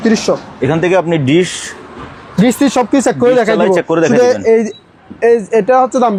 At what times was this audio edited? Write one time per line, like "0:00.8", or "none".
none